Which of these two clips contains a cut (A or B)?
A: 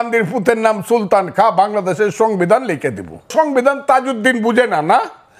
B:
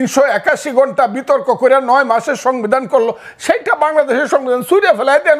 A